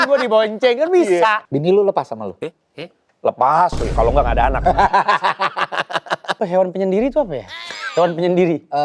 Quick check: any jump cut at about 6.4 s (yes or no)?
yes